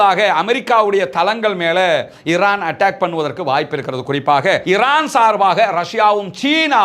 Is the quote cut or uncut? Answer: cut